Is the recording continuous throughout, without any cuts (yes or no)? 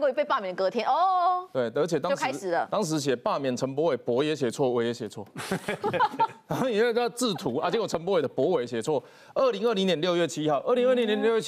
yes